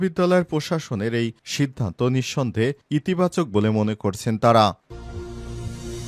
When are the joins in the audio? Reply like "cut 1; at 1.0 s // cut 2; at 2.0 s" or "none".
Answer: cut 1; at 4.8 s